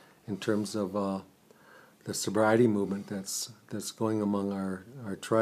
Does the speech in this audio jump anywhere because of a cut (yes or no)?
yes